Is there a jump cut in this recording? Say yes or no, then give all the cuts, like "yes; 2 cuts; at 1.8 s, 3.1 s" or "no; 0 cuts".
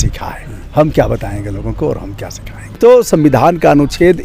yes; 1 cut; at 2.8 s